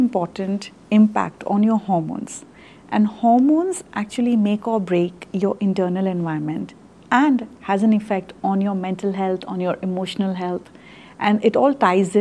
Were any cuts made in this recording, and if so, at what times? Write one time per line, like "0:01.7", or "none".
none